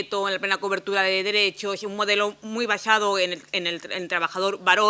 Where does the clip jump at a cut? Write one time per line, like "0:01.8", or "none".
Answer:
0:01.6